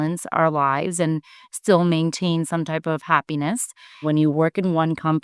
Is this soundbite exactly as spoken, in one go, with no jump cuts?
no; 1 cut; at 4.0 s

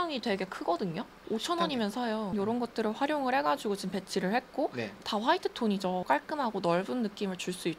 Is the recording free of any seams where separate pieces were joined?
yes; 0 cuts

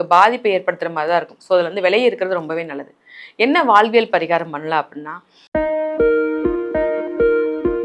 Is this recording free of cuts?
no; 1 cut; at 5.4 s

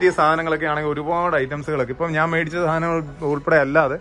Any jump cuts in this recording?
no; 0 cuts

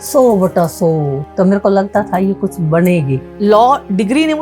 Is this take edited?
yes; 2 cuts; at 1.2 s, 3.2 s

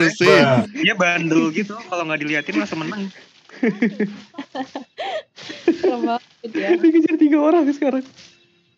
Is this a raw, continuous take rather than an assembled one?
yes; 0 cuts

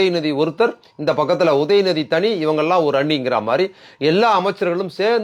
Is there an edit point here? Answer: no; 0 cuts

